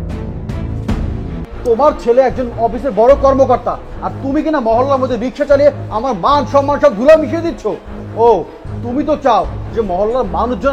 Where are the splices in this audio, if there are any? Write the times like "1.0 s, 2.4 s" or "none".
1.4 s